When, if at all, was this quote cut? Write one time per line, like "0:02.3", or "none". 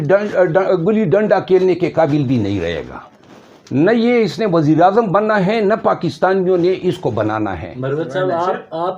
none